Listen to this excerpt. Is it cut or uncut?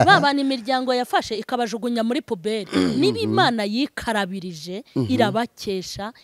uncut